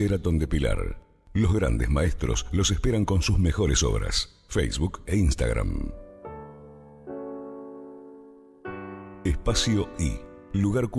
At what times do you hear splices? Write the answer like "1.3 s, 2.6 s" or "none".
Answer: 5.9 s, 7.3 s, 9.1 s